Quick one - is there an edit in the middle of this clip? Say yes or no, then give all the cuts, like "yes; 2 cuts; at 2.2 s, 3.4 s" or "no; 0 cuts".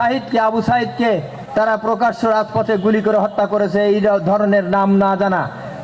no; 0 cuts